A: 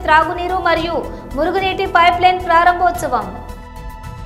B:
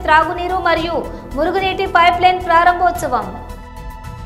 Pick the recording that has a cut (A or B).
A